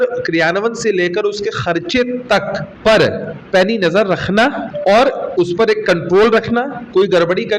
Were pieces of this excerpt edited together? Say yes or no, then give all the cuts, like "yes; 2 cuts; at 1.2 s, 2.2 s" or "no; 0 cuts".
yes; 3 cuts; at 2.7 s, 3.3 s, 4.7 s